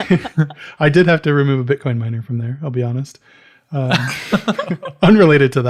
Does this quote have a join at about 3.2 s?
no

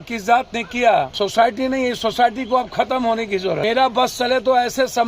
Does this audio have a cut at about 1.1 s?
yes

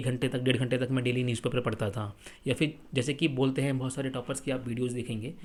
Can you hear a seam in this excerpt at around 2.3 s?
no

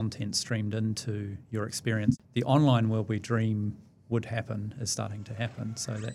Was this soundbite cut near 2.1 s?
yes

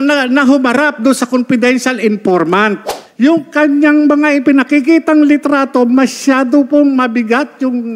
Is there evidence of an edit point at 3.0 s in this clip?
yes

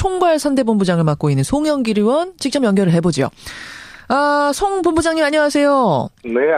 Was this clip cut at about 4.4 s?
no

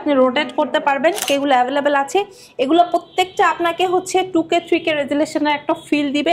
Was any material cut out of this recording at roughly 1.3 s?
yes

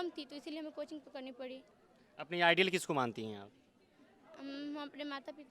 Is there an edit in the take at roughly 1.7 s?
yes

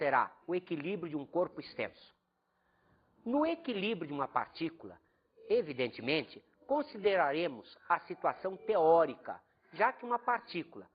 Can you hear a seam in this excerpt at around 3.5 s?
yes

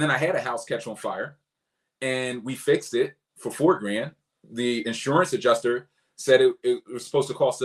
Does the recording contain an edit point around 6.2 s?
no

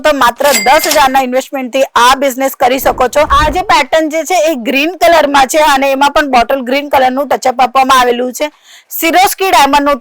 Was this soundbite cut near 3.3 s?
yes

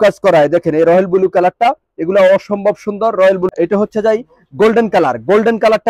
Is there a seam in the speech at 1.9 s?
no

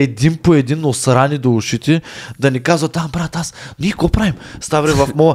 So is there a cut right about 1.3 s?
no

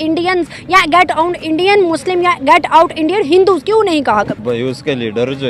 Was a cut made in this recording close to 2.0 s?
no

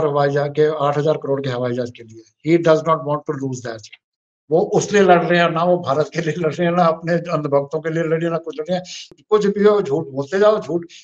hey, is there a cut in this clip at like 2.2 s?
no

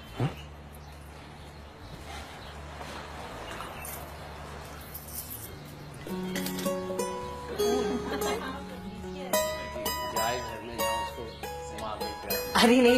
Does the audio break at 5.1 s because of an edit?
yes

